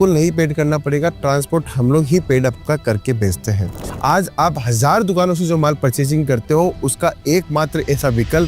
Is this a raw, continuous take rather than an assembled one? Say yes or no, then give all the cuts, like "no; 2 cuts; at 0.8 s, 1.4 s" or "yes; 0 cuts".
no; 1 cut; at 3.9 s